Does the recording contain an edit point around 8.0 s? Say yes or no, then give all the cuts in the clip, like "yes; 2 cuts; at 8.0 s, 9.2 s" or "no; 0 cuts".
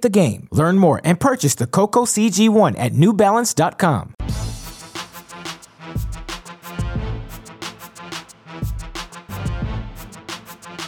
no; 2 cuts; at 4.1 s, 6.2 s